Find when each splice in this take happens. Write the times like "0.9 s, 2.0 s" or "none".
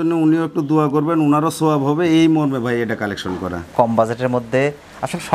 3.6 s